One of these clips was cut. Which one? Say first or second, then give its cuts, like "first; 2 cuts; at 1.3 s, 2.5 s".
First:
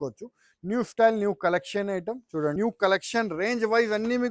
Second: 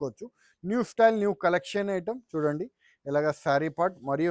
first; 1 cut; at 2.5 s